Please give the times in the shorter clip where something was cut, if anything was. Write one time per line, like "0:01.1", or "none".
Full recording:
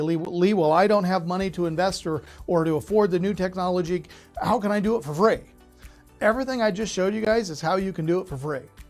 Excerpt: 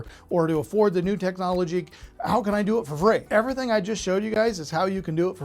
0:03.2